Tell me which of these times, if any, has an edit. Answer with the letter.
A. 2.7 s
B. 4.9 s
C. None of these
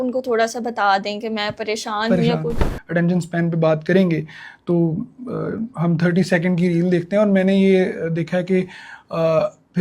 A